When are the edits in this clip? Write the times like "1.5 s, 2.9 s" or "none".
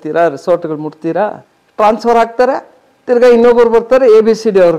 1.4 s